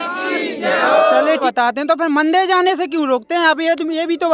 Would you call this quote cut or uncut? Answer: cut